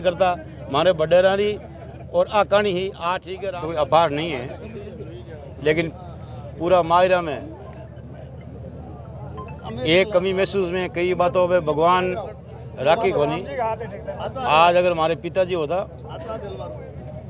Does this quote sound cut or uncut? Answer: cut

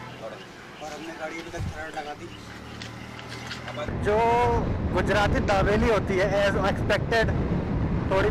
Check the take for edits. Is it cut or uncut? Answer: cut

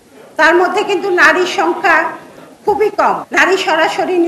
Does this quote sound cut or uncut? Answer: cut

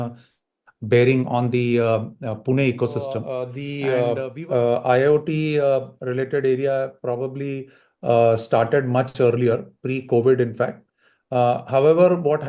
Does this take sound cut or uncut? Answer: cut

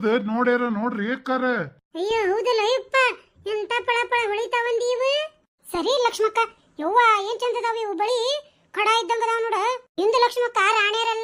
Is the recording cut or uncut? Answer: uncut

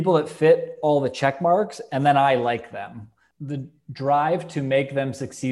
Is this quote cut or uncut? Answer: cut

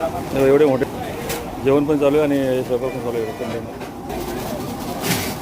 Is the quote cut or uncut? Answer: cut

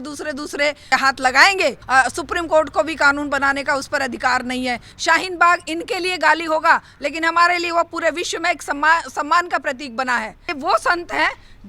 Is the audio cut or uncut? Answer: cut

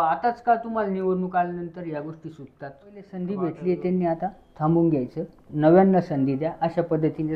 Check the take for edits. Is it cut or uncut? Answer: cut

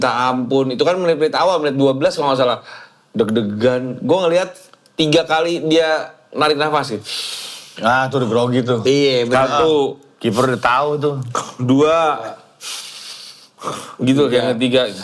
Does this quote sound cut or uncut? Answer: uncut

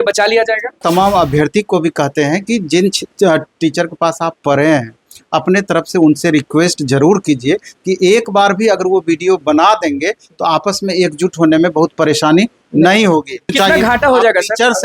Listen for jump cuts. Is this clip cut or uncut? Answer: cut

